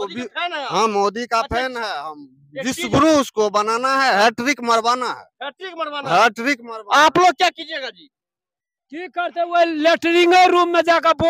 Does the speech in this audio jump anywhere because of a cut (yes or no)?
no